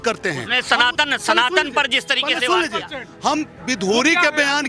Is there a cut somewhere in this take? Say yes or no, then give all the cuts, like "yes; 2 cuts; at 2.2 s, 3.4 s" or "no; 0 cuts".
no; 0 cuts